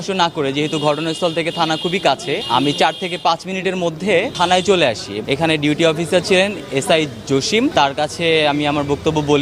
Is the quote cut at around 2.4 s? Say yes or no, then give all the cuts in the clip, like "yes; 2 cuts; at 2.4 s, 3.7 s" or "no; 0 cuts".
yes; 4 cuts; at 2.4 s, 4.3 s, 5.1 s, 7.7 s